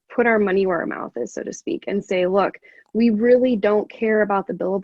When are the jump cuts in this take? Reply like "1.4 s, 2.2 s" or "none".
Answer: none